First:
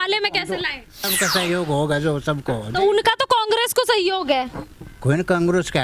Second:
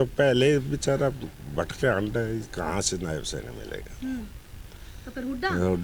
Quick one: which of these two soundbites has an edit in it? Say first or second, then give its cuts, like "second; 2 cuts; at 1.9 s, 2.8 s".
first; 1 cut; at 1.1 s